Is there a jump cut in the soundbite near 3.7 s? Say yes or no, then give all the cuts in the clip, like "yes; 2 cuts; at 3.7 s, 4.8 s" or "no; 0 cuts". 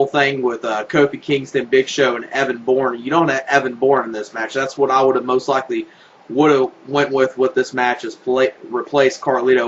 yes; 1 cut; at 3.7 s